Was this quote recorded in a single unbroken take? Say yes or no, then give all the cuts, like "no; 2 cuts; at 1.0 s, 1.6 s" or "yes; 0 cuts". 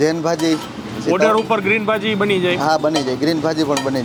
yes; 0 cuts